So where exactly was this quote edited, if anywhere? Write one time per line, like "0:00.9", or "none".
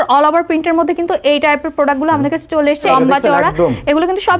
0:02.9